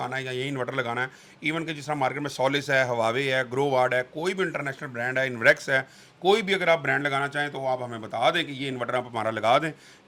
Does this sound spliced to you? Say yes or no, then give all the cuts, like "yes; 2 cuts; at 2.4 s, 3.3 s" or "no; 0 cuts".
no; 0 cuts